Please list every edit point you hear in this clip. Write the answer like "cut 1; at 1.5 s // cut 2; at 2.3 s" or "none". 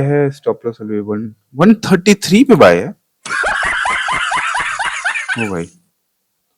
none